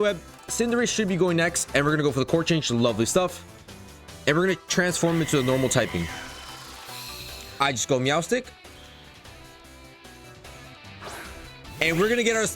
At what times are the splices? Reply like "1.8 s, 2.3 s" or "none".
7.5 s